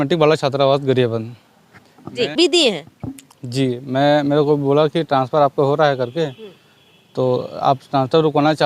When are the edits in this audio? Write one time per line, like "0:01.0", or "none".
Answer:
0:02.3